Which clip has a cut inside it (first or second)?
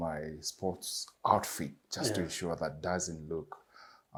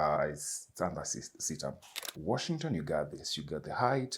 second